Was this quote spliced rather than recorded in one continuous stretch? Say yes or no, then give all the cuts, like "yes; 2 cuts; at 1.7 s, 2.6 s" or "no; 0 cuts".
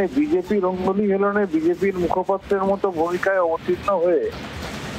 no; 0 cuts